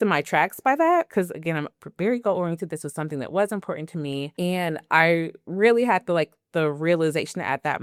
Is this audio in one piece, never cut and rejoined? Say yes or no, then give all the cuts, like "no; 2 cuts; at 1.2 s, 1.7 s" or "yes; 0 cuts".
yes; 0 cuts